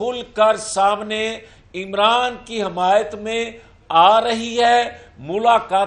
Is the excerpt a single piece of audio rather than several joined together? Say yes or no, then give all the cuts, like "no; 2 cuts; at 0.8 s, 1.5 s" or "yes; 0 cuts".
yes; 0 cuts